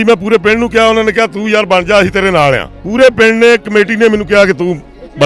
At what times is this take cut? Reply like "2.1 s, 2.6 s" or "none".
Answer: 2.7 s